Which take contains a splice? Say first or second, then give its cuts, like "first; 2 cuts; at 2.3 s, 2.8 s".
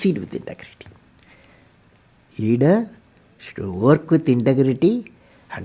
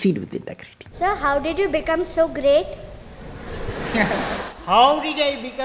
second; 1 cut; at 0.9 s